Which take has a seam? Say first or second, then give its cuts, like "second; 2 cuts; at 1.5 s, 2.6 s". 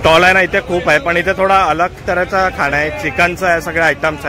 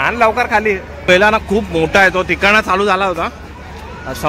second; 1 cut; at 1.1 s